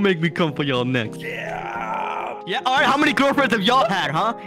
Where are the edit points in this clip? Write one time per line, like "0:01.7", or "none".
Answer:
none